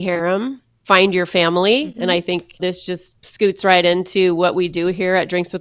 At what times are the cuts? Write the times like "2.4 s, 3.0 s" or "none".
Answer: 2.8 s

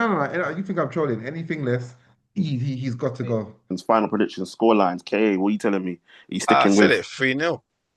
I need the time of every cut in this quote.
3.8 s

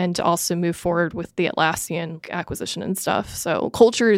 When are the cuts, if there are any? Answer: 1.3 s, 2.2 s

